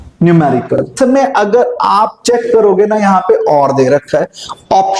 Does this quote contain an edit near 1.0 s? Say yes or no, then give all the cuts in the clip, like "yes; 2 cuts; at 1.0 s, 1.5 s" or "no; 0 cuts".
yes; 1 cut; at 1.0 s